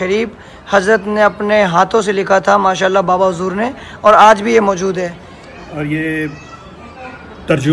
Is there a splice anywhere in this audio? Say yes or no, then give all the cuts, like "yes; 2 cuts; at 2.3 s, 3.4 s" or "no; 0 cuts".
no; 0 cuts